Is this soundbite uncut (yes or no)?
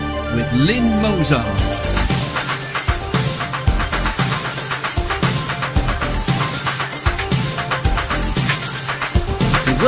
yes